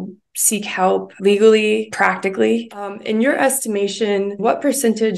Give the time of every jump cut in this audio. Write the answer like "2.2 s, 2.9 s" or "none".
1.1 s, 1.9 s, 3.0 s, 4.4 s